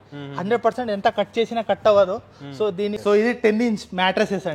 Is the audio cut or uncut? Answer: cut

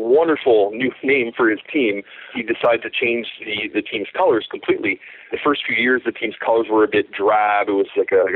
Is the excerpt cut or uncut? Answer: cut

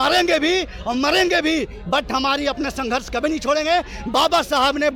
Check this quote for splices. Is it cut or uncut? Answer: uncut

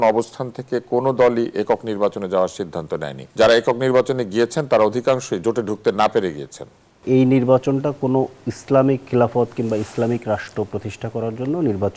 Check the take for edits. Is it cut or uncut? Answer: cut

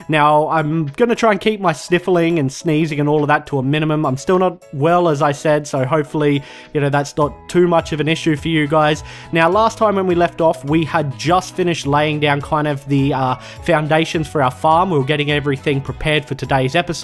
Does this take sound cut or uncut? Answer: cut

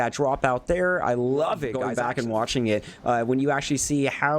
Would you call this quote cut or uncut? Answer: cut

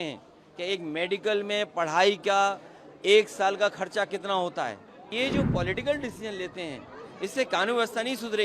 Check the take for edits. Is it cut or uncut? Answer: cut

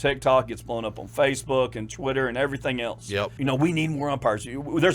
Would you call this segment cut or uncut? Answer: cut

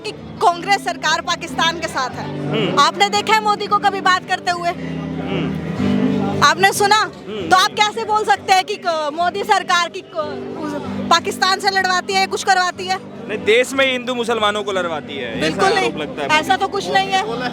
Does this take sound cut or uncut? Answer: uncut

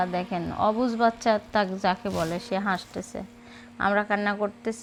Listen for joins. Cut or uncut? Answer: uncut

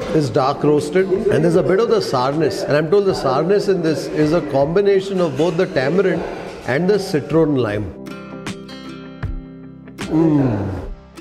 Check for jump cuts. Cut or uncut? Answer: uncut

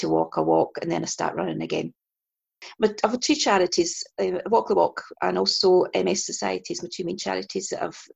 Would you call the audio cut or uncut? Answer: cut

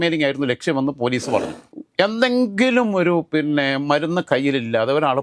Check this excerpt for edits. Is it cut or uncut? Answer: cut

